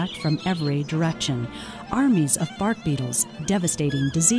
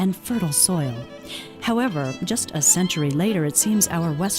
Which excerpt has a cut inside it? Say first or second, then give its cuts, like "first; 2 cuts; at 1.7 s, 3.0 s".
second; 1 cut; at 1.3 s